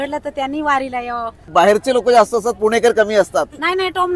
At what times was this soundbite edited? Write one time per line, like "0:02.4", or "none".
0:01.4